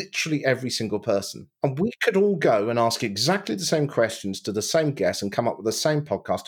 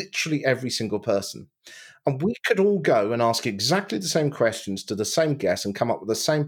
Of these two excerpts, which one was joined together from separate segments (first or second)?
first